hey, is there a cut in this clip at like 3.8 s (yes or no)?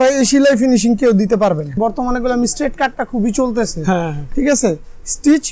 no